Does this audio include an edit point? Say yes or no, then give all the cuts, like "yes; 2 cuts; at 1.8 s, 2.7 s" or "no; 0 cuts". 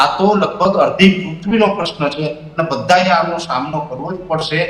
no; 0 cuts